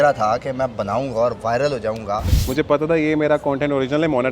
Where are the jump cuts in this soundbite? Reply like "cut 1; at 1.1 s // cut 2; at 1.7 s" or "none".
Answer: cut 1; at 2.4 s